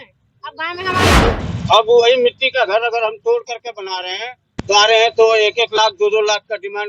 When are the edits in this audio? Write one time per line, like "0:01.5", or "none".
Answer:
0:01.1